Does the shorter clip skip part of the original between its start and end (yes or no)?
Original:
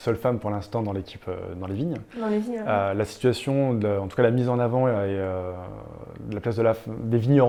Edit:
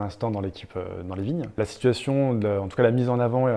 yes